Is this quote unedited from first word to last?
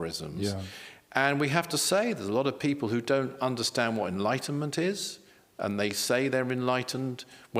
yes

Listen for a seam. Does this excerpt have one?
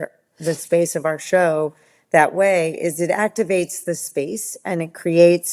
no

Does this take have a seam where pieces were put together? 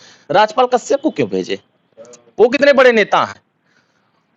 no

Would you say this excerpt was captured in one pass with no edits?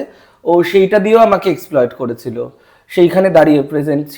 yes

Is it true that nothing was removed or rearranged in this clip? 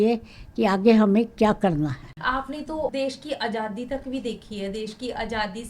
no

